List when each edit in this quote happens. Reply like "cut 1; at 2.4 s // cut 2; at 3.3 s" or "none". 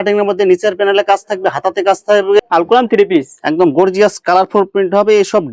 cut 1; at 2.4 s